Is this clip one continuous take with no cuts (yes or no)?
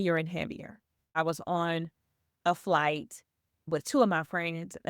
no